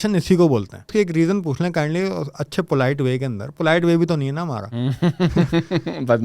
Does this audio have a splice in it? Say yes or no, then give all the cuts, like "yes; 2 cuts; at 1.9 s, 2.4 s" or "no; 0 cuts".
yes; 1 cut; at 0.9 s